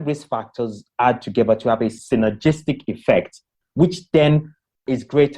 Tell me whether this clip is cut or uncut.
cut